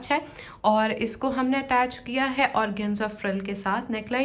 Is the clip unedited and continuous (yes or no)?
yes